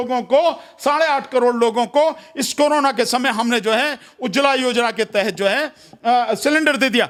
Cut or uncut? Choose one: uncut